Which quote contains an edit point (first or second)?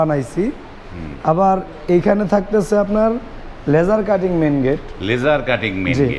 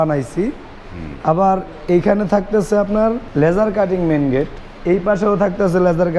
second